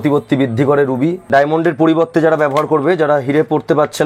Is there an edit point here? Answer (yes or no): yes